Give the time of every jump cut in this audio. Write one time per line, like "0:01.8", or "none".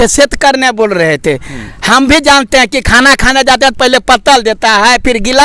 none